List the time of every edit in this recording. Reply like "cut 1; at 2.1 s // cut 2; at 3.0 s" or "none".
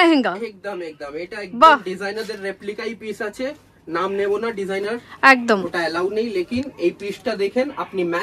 none